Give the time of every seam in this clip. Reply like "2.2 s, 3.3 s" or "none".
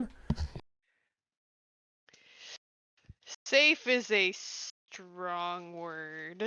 none